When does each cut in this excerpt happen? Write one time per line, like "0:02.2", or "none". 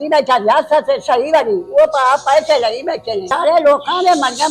0:03.2